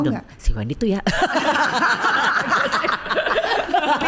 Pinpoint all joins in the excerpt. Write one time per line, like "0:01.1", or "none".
none